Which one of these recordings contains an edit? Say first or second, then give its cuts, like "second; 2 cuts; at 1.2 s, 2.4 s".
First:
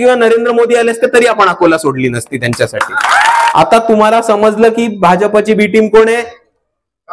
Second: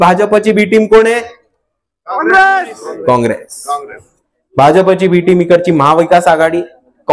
first; 1 cut; at 3.5 s